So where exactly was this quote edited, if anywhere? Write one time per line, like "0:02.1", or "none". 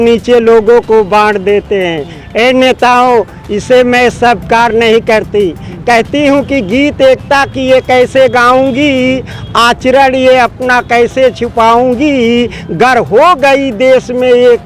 none